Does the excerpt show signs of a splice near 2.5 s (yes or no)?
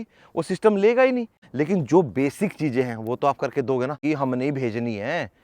no